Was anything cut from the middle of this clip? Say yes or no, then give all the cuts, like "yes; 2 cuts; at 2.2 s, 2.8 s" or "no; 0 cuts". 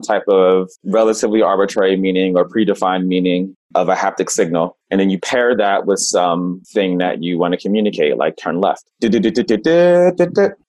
yes; 1 cut; at 3.6 s